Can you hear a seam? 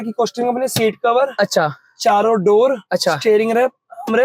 no; 0 cuts

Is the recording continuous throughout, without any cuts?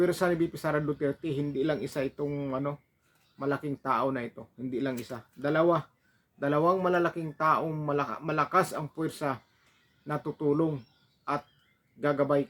yes; 0 cuts

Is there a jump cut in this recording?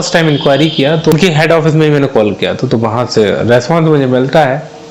yes; 1 cut; at 1.1 s

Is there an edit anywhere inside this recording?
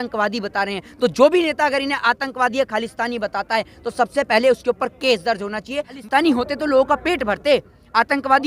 yes; 1 cut; at 6.0 s

